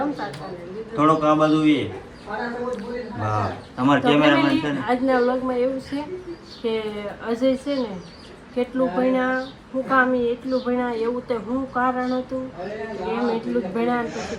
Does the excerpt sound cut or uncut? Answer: uncut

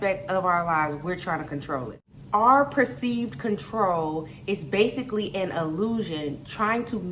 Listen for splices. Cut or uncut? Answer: cut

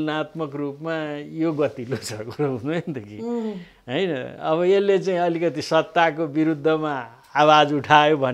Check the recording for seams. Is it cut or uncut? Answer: uncut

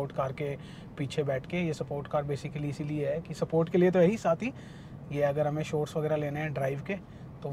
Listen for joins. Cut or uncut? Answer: uncut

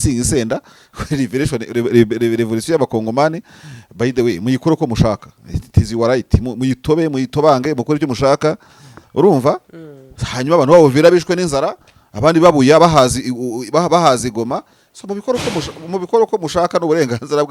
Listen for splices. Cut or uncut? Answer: uncut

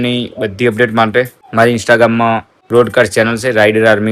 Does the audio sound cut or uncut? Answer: cut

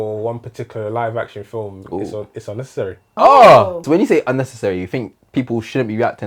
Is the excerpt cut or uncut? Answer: cut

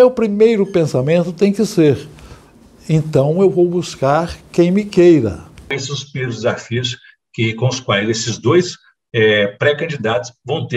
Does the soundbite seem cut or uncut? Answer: cut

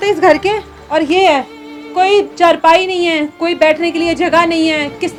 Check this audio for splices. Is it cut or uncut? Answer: uncut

